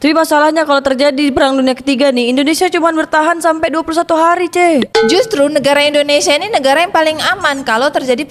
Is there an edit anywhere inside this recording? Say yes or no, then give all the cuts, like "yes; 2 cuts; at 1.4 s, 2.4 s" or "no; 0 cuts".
no; 0 cuts